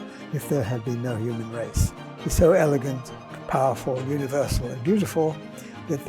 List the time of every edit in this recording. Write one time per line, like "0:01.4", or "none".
0:01.9